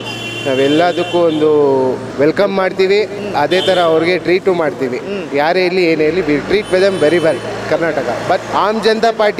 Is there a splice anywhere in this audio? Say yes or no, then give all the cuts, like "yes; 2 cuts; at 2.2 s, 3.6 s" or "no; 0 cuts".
yes; 2 cuts; at 2.1 s, 8.5 s